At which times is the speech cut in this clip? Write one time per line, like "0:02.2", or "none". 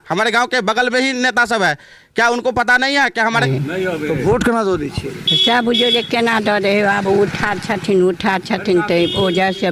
0:03.4